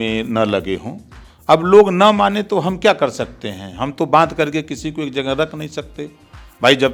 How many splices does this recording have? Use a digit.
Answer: 0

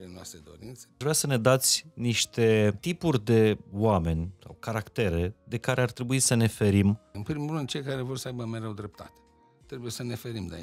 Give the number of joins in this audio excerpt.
3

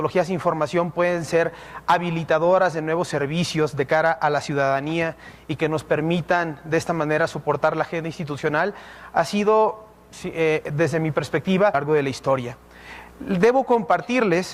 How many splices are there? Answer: 0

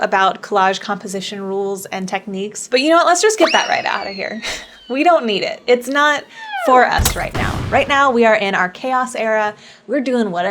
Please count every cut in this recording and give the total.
1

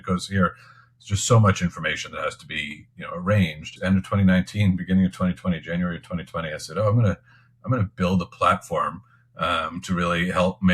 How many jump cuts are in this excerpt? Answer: 1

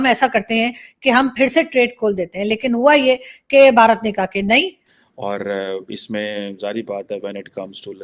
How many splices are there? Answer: 1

